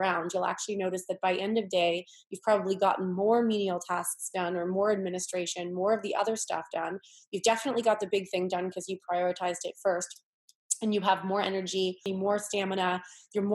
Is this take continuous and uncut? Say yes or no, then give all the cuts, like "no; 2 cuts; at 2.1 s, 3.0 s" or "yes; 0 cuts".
no; 1 cut; at 12.0 s